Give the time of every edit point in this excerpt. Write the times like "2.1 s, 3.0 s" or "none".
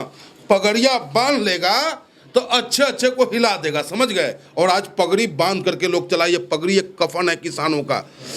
none

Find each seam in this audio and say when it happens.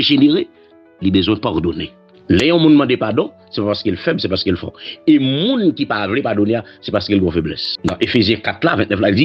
2.1 s, 7.7 s

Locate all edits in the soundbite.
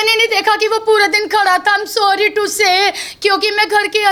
none

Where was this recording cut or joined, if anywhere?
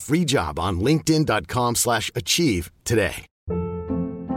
3.3 s

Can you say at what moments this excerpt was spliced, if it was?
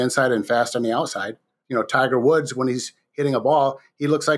1.6 s

